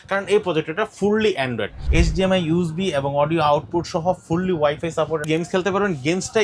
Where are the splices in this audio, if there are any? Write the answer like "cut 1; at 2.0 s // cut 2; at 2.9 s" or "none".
cut 1; at 1.8 s // cut 2; at 5.2 s